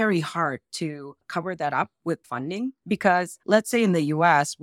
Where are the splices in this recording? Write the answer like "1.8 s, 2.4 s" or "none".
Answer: 2.8 s